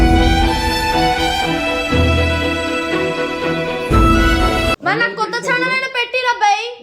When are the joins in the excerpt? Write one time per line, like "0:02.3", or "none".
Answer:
0:04.8